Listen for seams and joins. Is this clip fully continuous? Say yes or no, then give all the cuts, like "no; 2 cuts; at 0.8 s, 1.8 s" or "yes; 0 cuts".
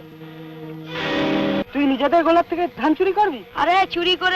no; 1 cut; at 1.6 s